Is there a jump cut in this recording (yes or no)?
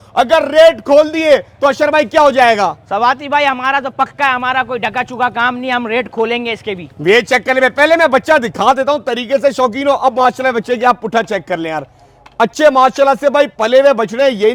no